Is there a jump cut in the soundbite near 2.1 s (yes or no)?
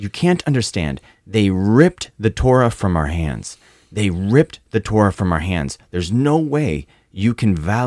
no